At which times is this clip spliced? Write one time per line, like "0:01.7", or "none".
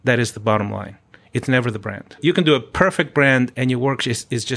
0:02.2
0:03.5